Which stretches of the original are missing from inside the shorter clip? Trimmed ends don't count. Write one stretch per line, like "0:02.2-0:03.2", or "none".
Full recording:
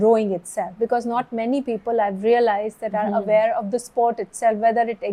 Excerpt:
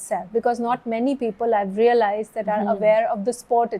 none